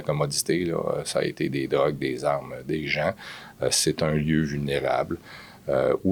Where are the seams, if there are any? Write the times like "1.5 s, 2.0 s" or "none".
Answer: none

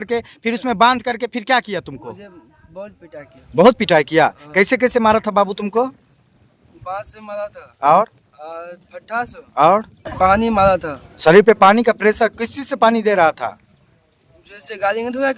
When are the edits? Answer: none

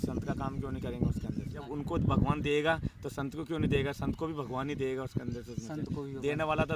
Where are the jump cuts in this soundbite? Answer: 1.6 s

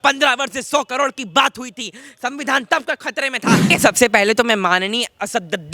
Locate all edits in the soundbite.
3.7 s

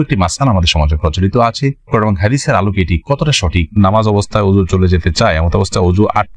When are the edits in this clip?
3.8 s

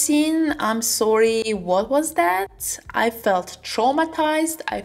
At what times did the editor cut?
none

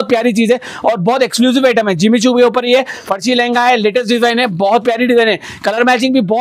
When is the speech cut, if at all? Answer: none

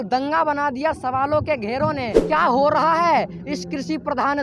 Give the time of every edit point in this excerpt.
2.2 s

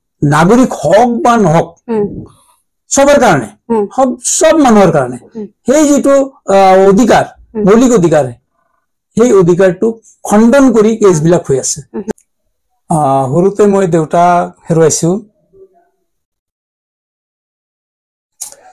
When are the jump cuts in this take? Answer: 12.1 s

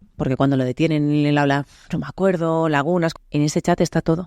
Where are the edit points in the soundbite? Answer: 3.1 s

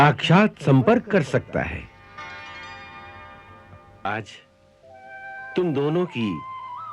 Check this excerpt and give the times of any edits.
4.1 s

